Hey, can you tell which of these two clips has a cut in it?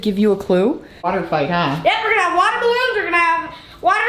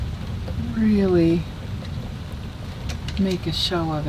first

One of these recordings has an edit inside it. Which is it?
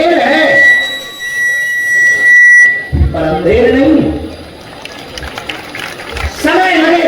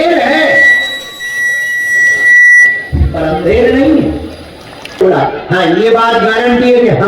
second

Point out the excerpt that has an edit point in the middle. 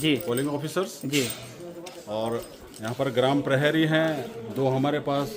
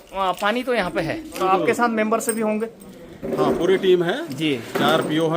second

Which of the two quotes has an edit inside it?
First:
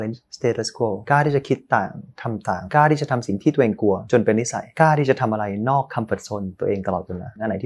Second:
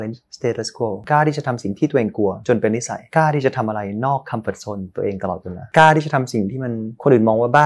second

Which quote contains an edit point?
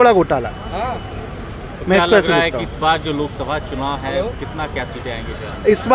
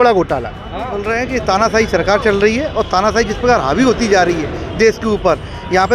second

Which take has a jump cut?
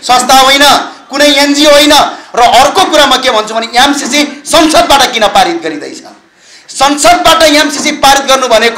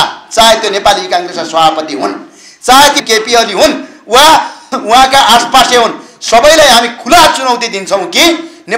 second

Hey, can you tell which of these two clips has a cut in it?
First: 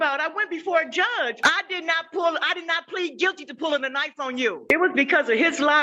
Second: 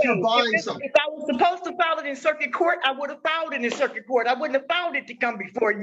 first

